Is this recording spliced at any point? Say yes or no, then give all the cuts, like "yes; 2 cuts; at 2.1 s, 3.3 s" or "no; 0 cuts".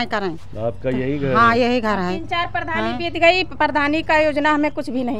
no; 0 cuts